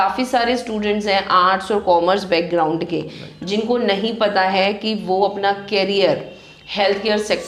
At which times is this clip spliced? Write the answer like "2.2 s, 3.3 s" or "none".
none